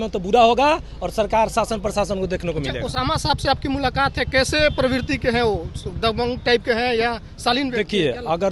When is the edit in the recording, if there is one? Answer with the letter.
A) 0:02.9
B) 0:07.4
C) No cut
C